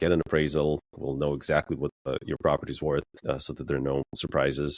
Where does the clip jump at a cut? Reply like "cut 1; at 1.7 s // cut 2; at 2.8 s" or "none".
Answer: cut 1; at 2.1 s // cut 2; at 3.1 s